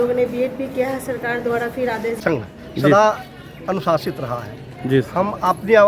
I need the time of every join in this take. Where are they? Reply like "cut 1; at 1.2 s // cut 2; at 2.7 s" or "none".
cut 1; at 2.2 s

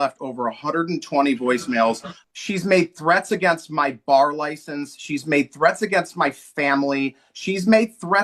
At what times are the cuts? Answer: cut 1; at 2.1 s

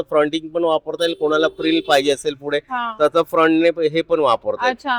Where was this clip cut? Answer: none

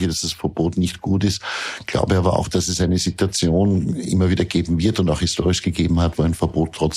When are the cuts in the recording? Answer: none

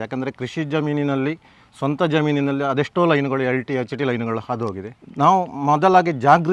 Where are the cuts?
none

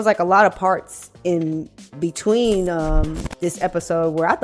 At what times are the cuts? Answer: none

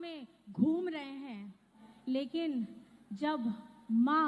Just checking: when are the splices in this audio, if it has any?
cut 1; at 1.9 s

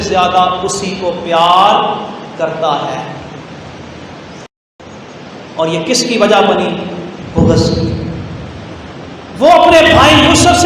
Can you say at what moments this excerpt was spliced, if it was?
cut 1; at 4.8 s

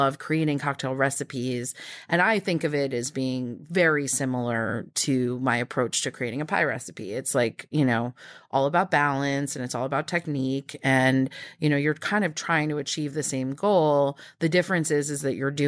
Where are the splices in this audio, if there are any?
none

